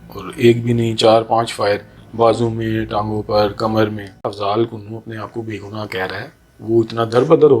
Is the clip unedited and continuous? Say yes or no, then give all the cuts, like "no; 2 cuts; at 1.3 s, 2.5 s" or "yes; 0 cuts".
no; 1 cut; at 4.3 s